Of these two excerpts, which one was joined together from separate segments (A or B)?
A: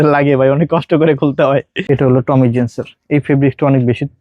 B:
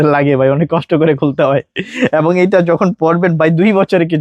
A